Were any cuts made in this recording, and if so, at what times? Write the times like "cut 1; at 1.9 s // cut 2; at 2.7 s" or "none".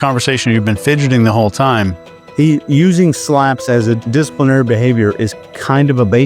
cut 1; at 2.0 s